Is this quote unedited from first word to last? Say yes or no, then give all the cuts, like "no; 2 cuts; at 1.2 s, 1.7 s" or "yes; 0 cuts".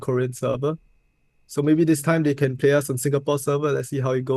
yes; 0 cuts